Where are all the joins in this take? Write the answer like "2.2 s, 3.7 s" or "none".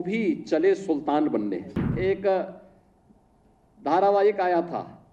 1.9 s